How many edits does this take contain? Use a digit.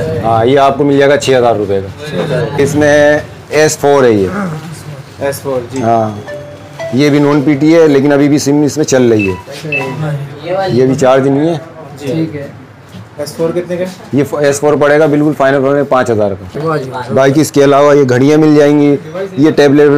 2